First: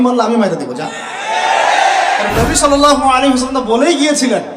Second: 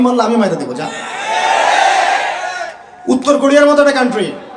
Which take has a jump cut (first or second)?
first